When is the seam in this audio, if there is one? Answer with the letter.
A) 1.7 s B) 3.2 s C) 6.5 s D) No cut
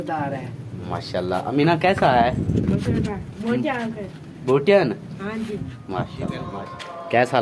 C